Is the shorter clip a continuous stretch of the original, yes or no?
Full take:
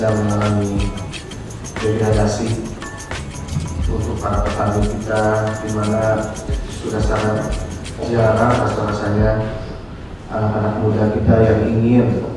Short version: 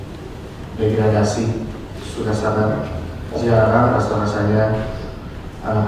no